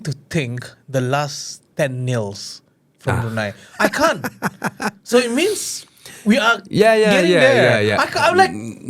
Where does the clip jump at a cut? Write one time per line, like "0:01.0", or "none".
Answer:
none